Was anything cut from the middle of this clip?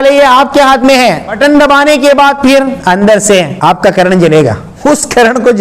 yes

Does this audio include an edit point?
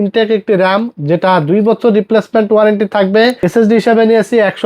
yes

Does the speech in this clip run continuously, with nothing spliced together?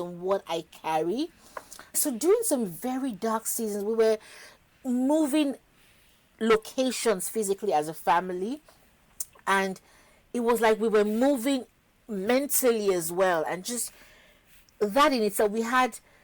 yes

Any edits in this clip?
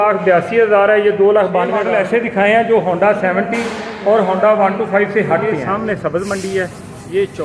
yes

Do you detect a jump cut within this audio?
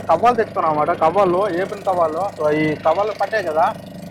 no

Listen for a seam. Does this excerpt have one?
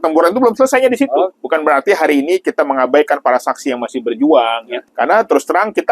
yes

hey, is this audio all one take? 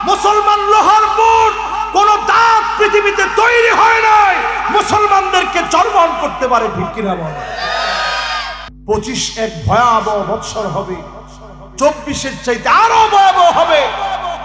no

